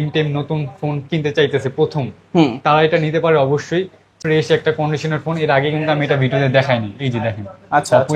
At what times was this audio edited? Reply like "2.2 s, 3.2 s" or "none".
4.1 s